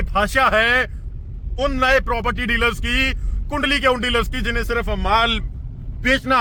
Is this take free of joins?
yes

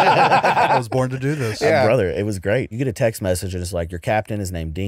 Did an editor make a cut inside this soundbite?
yes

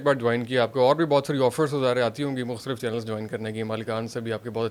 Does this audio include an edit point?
no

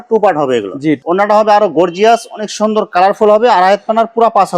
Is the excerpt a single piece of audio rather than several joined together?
no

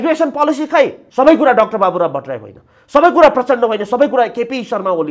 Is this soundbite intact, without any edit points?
no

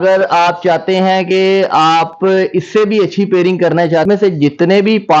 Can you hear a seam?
yes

